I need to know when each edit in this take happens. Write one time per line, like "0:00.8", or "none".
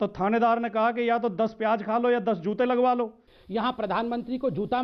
0:03.4